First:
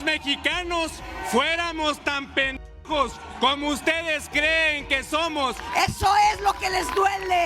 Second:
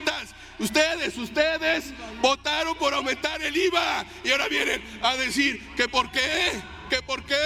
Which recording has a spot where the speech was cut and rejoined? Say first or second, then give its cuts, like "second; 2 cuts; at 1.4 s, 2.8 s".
first; 1 cut; at 5.6 s